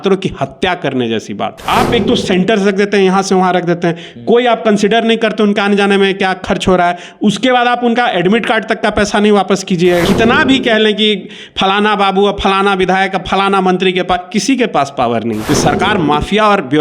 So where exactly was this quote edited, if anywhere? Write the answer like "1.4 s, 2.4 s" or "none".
1.6 s, 10.0 s, 15.4 s